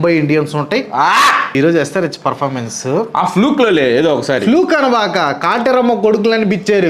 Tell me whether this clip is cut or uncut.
cut